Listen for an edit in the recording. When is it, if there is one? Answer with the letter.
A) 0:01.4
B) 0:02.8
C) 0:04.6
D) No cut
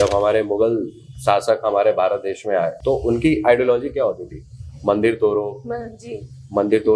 B